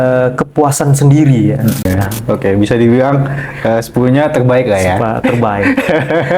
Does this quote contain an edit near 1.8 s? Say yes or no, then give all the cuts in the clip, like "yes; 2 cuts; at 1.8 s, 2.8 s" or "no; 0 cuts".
yes; 1 cut; at 1.8 s